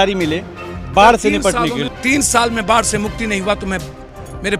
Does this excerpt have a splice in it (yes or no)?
yes